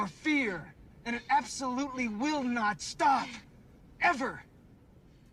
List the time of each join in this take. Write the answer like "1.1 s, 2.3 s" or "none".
none